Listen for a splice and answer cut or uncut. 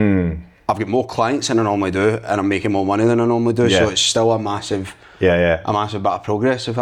uncut